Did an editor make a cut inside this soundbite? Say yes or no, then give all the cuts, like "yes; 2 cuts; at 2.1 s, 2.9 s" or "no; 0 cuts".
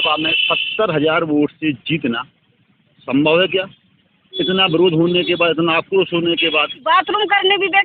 yes; 1 cut; at 6.8 s